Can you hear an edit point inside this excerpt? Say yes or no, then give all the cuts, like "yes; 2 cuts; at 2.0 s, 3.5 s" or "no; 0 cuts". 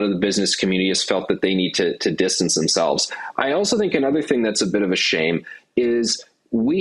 no; 0 cuts